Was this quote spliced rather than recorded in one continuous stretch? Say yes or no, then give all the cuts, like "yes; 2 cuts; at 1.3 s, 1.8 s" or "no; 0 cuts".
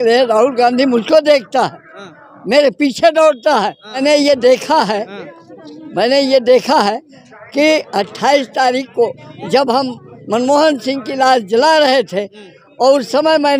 yes; 1 cut; at 4.0 s